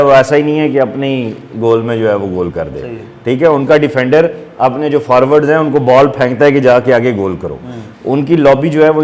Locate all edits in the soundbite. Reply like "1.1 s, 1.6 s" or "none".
none